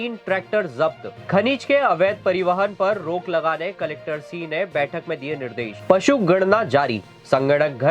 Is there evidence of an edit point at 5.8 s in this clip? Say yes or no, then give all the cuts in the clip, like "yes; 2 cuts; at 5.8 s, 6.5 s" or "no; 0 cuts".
yes; 2 cuts; at 1.1 s, 5.8 s